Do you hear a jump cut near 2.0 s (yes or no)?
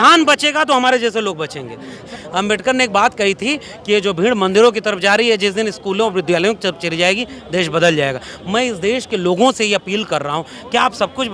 yes